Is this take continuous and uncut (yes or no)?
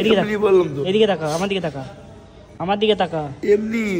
yes